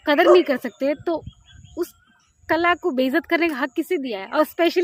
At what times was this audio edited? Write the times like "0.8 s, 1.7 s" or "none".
none